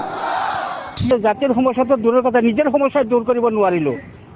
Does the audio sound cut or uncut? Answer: cut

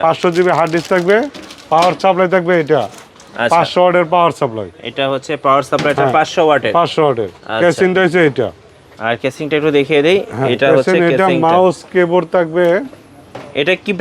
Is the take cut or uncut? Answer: uncut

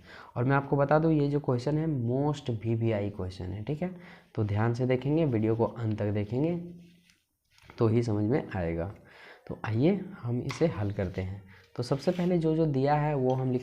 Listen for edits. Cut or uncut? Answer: uncut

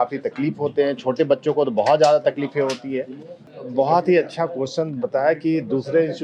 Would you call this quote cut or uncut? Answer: cut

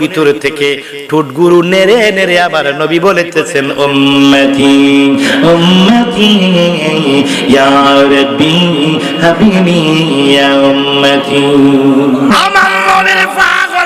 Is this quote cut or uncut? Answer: cut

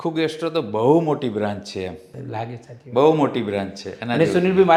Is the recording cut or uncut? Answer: uncut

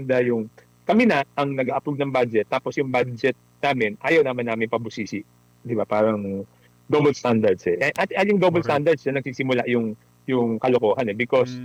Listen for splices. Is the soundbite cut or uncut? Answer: uncut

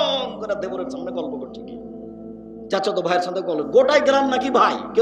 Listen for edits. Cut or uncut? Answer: uncut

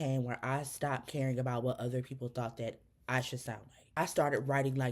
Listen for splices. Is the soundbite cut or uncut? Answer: cut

